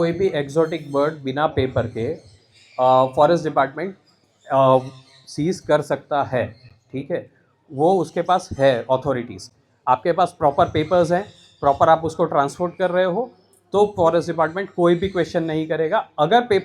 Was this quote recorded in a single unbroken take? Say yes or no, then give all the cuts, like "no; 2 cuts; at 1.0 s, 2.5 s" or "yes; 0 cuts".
yes; 0 cuts